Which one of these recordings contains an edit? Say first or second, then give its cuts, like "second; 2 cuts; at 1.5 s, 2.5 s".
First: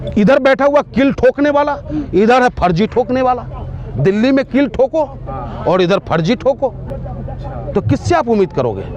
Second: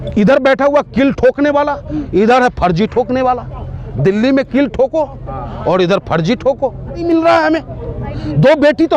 second; 1 cut; at 7.0 s